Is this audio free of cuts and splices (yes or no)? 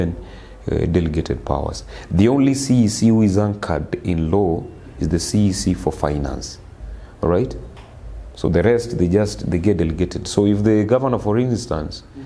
yes